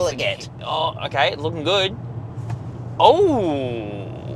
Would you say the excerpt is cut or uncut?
uncut